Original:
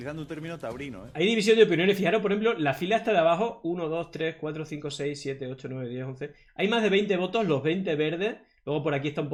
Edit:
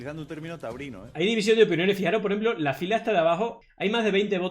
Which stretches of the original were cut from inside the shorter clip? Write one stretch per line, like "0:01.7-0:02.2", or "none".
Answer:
0:03.6-0:06.4